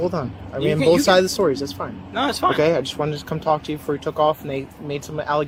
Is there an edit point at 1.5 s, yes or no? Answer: no